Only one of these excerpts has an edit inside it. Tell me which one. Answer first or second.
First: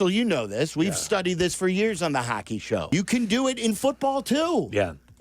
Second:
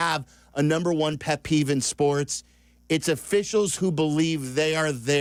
first